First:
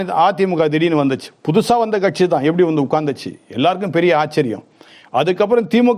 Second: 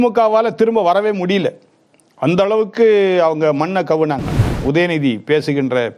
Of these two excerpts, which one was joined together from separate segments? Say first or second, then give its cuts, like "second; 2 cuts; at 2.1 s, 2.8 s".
second; 1 cut; at 4.4 s